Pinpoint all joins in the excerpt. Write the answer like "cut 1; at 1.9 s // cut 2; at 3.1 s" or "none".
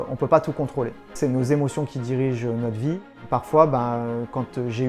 cut 1; at 1.1 s // cut 2; at 3.1 s